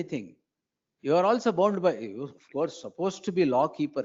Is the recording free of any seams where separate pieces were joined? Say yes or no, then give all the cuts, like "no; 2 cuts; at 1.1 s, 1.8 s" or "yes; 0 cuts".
yes; 0 cuts